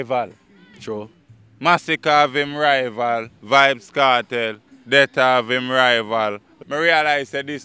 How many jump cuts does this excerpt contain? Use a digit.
1